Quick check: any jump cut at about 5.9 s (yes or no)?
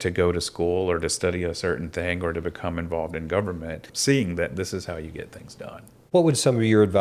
yes